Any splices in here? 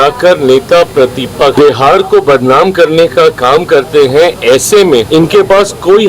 yes; 2 cuts; at 1.5 s, 5.1 s

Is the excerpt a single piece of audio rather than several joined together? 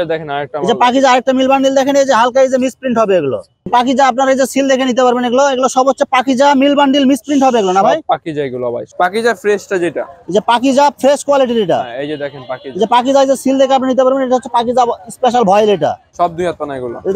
no; 3 cuts; at 3.7 s, 8.8 s, 16.1 s

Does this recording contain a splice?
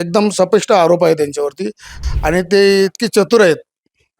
yes; 1 cut; at 1.9 s

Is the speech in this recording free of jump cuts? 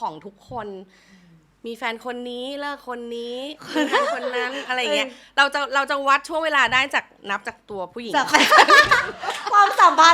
yes; 0 cuts

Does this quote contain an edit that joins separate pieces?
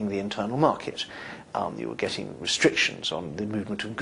no; 0 cuts

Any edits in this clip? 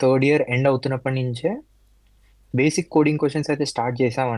no; 0 cuts

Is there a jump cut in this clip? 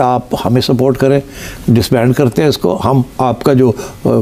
no; 0 cuts

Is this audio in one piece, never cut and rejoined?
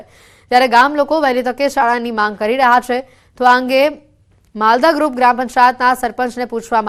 yes; 0 cuts

